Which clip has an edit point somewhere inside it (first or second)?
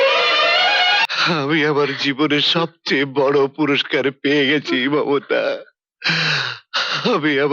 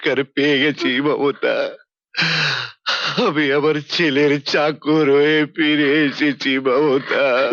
first